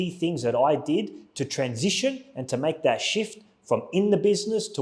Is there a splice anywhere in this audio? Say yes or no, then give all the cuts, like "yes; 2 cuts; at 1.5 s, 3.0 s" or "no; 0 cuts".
no; 0 cuts